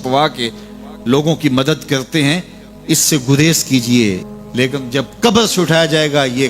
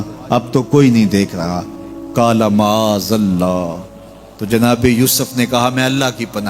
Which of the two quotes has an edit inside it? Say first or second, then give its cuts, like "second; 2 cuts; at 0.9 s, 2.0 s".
first; 1 cut; at 4.4 s